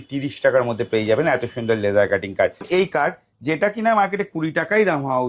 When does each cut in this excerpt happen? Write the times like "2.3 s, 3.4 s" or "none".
2.6 s